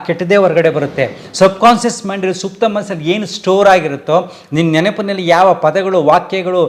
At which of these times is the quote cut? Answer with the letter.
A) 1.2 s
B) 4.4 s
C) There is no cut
C